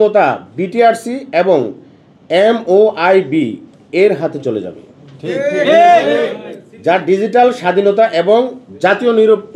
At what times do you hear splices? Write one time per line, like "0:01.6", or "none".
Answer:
none